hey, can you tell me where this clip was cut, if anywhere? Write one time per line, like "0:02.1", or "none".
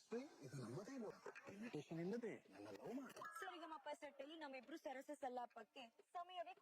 0:01.2